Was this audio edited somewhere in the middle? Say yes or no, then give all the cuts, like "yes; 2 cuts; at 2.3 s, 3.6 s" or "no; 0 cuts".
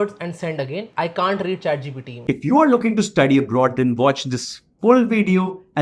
yes; 1 cut; at 2.3 s